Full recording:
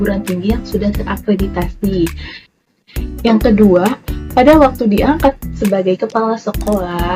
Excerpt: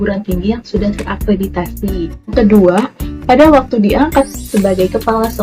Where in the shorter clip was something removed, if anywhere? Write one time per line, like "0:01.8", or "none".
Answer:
0:02.3